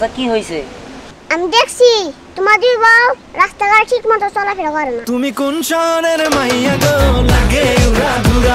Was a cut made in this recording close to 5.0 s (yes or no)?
yes